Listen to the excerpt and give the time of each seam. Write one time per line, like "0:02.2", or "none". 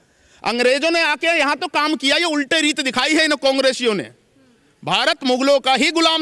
none